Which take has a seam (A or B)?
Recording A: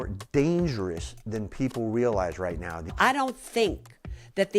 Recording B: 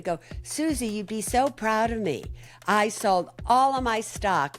A